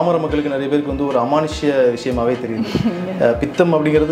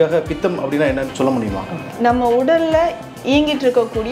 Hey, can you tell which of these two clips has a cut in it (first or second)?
second